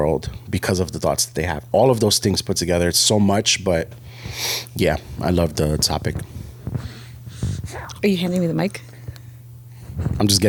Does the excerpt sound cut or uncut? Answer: uncut